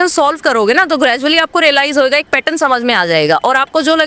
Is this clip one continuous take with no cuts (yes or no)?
yes